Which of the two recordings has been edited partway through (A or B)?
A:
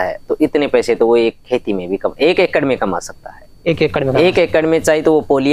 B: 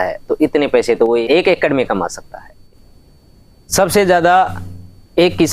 B